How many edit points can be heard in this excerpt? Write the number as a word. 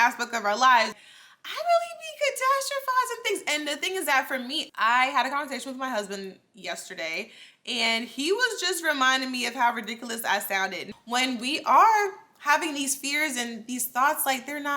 three